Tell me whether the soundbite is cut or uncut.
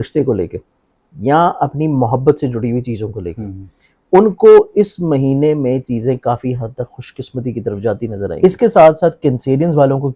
cut